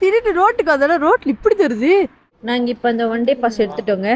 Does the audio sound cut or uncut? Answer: cut